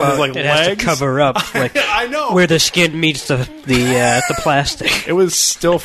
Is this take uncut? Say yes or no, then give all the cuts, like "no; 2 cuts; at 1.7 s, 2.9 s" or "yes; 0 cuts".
yes; 0 cuts